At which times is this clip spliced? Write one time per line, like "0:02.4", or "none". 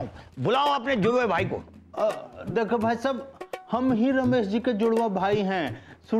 none

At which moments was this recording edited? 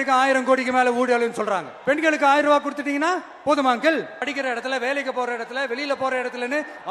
0:01.7
0:04.2

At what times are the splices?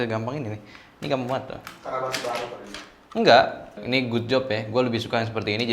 0:03.8

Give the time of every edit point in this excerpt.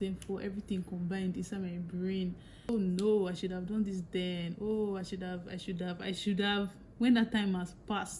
0:02.7

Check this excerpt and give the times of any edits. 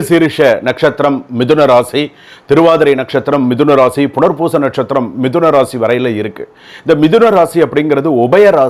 none

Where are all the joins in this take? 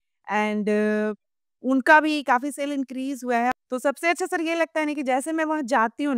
0:03.5

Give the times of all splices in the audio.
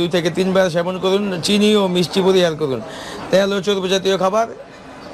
none

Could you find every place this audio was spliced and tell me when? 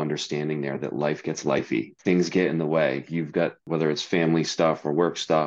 0:01.9
0:03.6

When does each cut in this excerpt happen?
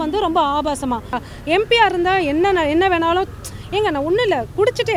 0:01.3

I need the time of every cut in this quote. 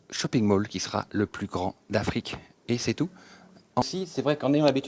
0:03.9

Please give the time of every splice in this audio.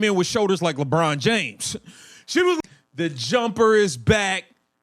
0:02.6

